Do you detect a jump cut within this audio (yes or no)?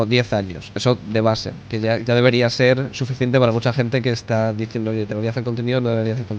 no